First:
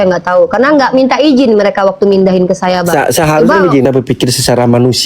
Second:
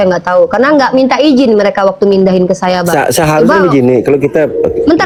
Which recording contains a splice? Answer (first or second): first